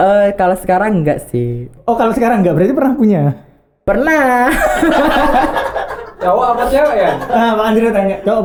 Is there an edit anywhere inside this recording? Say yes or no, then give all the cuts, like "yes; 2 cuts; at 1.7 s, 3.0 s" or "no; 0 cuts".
no; 0 cuts